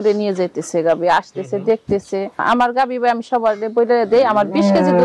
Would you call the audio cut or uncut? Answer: cut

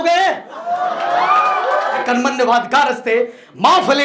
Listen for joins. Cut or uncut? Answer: cut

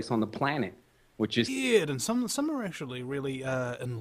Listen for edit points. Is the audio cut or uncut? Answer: uncut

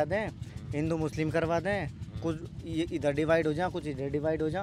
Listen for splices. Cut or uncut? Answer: uncut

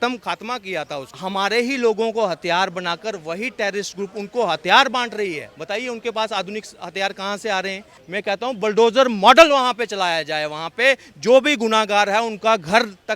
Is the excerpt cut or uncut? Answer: cut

